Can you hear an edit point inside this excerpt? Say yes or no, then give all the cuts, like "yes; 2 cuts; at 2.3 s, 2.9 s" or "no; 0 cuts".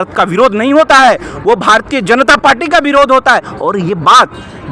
no; 0 cuts